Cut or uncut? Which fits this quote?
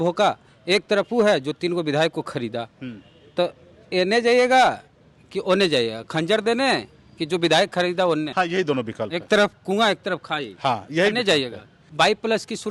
cut